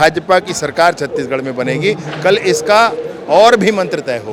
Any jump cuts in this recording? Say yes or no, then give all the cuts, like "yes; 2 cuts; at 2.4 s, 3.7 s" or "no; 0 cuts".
no; 0 cuts